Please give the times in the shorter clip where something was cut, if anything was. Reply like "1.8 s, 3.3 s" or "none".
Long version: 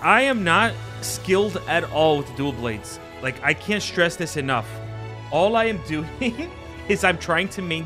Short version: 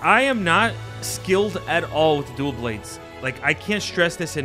none